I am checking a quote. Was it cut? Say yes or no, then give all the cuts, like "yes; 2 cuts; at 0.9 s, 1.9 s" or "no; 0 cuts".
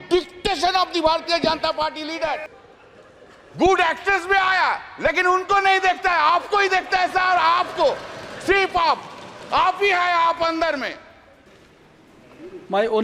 yes; 2 cuts; at 2.5 s, 11.6 s